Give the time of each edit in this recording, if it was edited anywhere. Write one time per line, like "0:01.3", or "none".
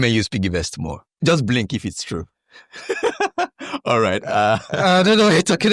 0:01.0